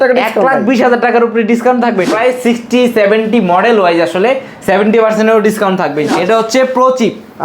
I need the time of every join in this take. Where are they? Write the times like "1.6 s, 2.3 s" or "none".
2.1 s, 6.1 s